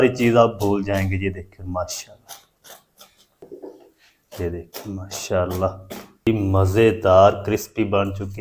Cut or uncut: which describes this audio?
cut